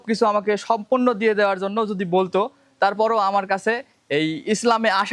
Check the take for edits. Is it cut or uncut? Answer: uncut